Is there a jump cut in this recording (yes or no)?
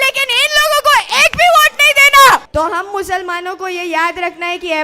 yes